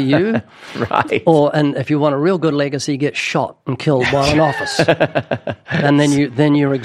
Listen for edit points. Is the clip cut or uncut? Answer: uncut